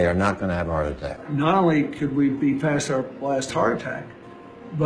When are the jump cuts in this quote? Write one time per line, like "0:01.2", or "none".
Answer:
0:01.2